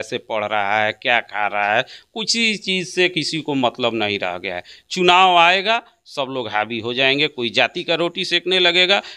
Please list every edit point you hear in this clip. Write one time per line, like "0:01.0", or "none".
none